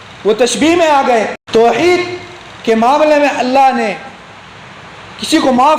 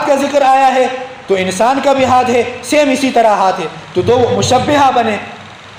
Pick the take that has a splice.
first; 1 cut; at 1.4 s

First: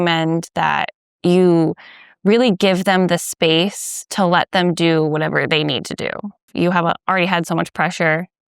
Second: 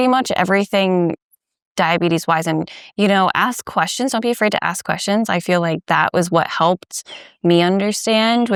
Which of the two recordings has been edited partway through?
first; 2 cuts; at 1.0 s, 6.5 s

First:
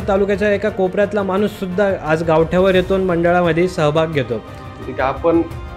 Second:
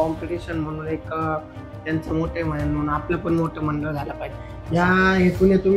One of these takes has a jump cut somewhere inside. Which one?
first; 1 cut; at 4.9 s

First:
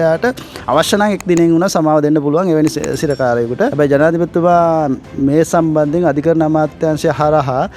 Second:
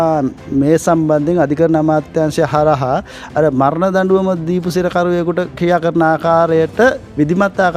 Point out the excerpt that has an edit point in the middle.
first; 1 cut; at 3.7 s

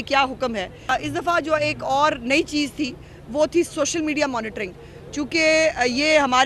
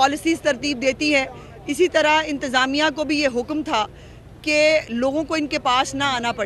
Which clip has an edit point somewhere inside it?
first; 1 cut; at 0.9 s

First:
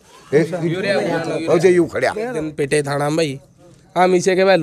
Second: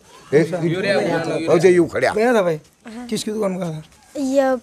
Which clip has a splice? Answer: first; 1 cut; at 2.3 s

